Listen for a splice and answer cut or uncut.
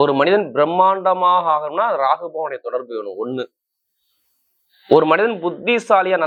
uncut